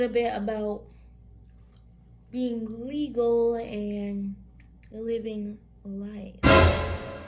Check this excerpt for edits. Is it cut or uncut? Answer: cut